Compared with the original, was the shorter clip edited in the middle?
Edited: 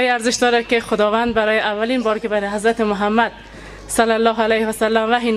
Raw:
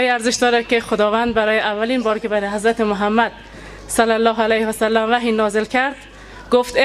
no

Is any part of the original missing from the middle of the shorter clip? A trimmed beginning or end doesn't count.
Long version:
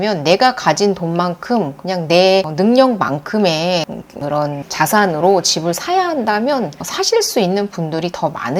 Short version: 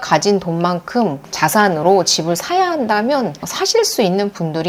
yes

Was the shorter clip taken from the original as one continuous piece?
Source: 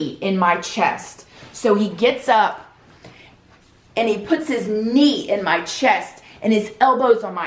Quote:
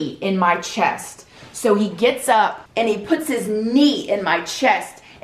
no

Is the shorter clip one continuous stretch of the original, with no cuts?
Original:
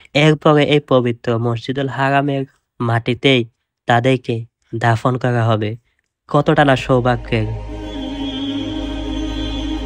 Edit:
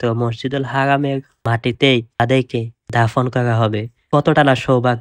no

